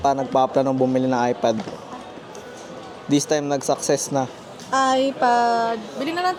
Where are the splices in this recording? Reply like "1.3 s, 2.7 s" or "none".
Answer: none